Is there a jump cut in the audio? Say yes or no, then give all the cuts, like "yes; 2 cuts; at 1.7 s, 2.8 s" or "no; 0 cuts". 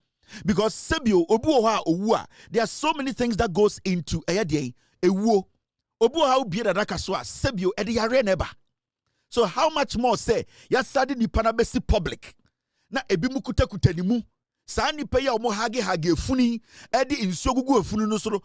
no; 0 cuts